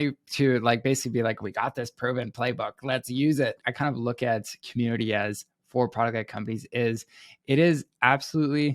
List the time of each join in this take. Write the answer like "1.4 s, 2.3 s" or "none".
3.6 s